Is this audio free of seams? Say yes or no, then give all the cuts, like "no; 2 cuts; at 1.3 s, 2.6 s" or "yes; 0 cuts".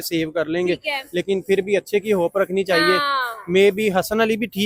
yes; 0 cuts